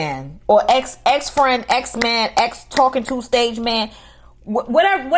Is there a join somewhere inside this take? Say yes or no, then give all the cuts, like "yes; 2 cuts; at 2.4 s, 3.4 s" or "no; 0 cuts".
no; 0 cuts